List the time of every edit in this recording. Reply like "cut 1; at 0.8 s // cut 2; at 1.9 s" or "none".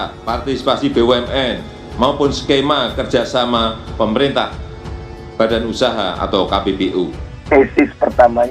cut 1; at 7.4 s